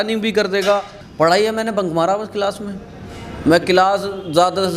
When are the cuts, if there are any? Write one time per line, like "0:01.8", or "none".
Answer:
0:01.0